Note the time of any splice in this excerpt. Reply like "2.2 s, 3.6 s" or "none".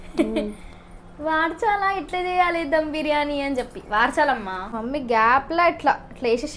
4.7 s